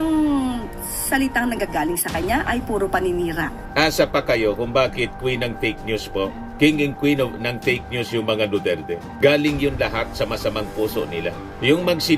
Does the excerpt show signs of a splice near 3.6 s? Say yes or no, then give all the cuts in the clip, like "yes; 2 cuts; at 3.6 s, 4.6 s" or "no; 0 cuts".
yes; 1 cut; at 3.6 s